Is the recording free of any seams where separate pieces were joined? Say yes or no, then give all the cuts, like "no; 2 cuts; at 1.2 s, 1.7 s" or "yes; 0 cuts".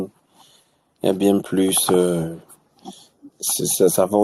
yes; 0 cuts